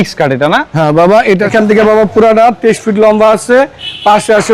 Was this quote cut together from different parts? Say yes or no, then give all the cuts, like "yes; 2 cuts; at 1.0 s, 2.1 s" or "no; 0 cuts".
yes; 1 cut; at 1.5 s